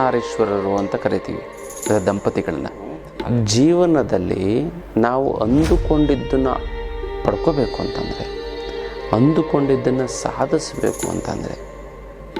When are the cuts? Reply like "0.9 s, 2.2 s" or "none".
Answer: 3.1 s